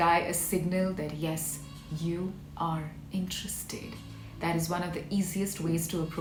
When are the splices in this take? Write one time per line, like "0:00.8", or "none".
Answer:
none